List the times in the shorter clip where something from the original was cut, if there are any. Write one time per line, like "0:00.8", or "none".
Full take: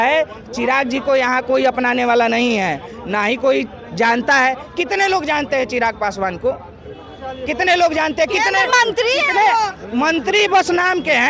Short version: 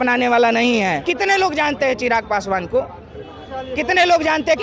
0:01.0